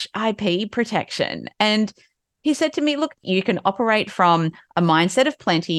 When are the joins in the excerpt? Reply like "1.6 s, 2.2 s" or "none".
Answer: 3.2 s